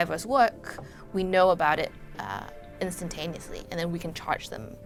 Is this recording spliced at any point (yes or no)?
no